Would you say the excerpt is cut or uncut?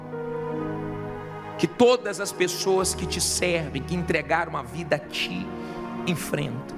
cut